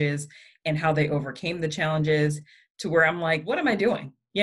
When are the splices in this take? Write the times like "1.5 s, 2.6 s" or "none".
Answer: 3.5 s